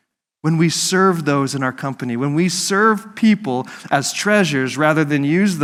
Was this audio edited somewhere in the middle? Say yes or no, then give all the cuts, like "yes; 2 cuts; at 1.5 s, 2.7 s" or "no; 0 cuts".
no; 0 cuts